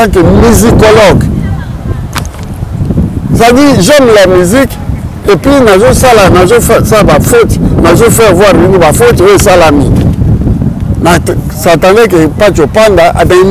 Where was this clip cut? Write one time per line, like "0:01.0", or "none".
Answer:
none